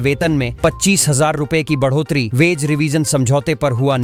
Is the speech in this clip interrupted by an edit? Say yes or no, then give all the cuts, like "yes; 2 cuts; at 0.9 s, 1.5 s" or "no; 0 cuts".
no; 0 cuts